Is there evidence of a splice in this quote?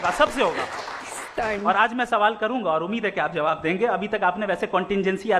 no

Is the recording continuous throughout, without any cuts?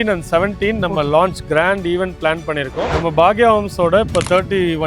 no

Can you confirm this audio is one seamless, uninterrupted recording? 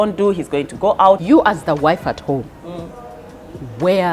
no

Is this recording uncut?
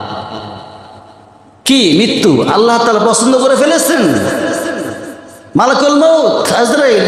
yes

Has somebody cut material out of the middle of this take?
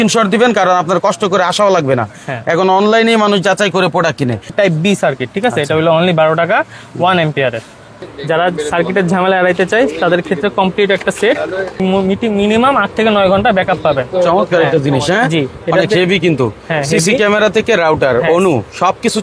yes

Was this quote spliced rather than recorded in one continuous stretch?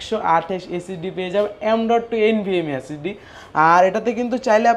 no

